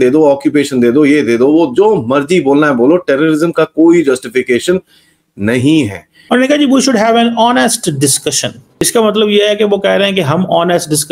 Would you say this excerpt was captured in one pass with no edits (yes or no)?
no